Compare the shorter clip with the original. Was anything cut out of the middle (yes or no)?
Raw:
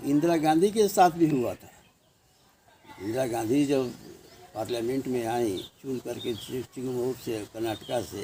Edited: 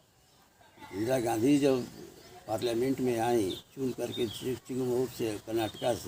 no